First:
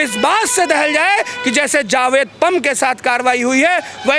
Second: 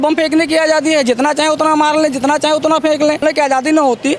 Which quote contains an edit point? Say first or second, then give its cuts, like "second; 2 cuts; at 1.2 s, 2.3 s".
second; 1 cut; at 3.2 s